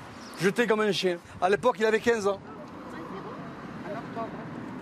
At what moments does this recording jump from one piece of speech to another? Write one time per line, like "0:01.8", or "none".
none